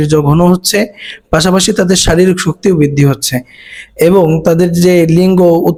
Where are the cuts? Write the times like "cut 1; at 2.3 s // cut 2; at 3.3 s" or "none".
none